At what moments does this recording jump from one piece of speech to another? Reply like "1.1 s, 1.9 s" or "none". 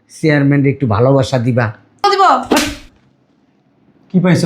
2.0 s